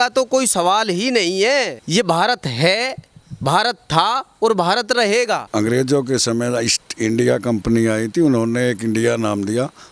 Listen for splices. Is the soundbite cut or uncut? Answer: cut